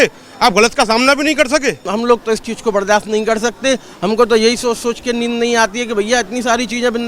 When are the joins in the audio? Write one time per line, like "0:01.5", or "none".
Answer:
0:01.9